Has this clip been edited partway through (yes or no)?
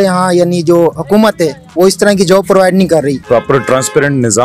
yes